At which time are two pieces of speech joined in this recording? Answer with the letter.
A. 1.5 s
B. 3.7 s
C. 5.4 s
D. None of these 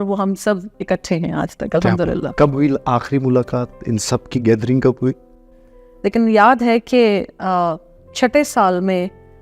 C